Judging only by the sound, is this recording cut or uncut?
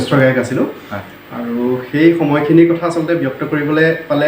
uncut